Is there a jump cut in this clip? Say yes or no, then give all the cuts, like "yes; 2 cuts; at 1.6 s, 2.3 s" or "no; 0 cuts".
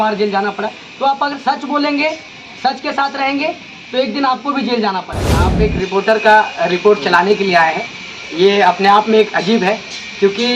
yes; 1 cut; at 5.5 s